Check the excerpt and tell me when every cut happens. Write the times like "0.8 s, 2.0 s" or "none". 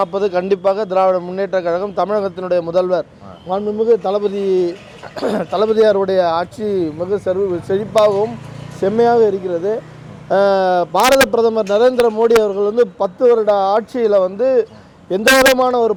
none